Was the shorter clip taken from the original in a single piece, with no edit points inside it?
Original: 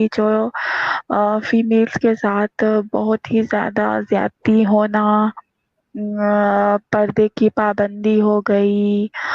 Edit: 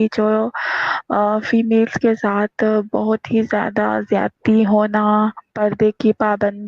no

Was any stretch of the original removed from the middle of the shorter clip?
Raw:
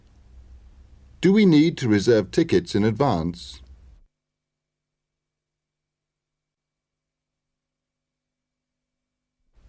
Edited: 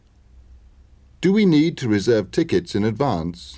no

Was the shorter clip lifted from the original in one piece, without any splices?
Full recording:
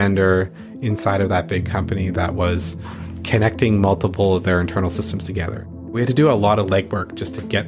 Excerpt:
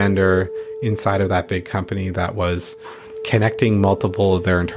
yes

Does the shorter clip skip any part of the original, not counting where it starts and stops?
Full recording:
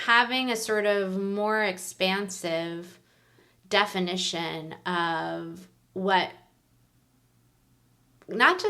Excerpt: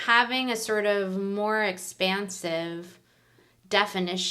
no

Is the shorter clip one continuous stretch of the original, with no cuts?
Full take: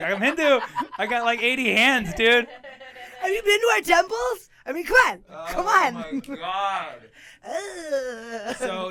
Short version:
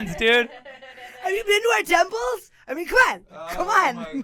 yes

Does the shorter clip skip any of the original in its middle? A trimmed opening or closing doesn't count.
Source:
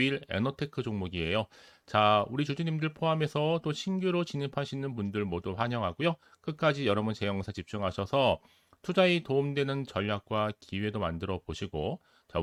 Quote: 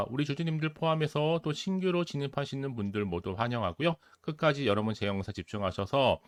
no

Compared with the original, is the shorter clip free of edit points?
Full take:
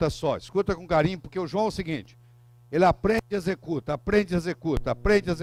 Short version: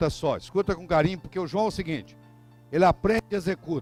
yes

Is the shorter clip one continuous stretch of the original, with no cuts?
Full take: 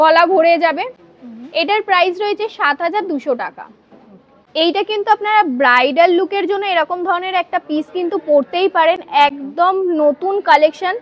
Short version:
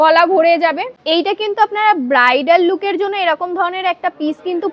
no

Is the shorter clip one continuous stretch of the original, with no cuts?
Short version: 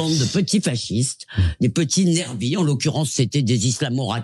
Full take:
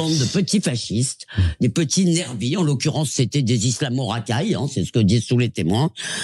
yes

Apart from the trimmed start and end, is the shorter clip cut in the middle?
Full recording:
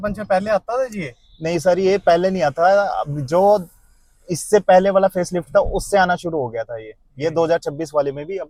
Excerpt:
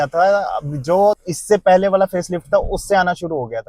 yes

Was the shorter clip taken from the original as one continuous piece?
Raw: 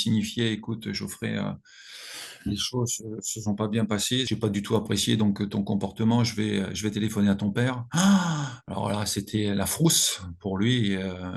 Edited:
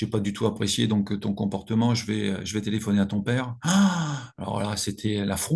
yes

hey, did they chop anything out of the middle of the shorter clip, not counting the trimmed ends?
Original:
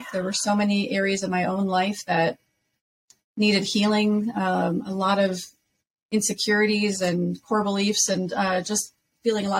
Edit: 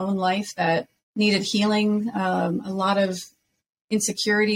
yes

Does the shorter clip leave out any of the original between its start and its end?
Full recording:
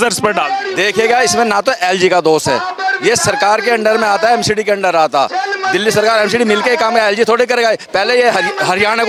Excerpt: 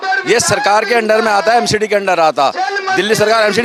no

